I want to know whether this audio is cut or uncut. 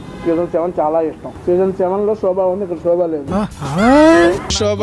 cut